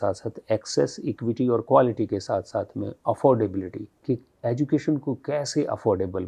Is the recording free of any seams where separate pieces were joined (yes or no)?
yes